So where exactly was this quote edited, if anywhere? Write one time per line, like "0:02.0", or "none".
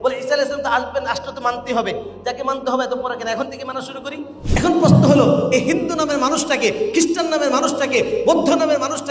0:04.3